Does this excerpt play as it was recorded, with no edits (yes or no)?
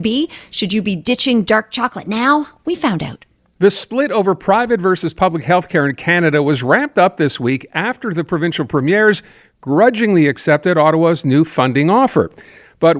no